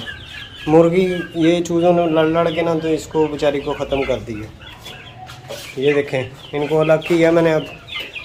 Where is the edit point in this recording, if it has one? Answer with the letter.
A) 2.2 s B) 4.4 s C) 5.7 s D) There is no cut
D